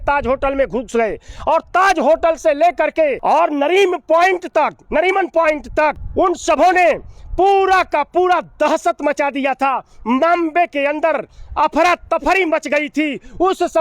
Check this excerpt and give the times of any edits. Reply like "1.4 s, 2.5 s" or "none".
3.2 s, 6.0 s